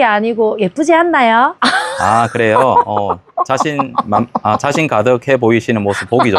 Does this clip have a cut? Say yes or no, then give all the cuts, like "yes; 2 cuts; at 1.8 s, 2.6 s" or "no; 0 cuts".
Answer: no; 0 cuts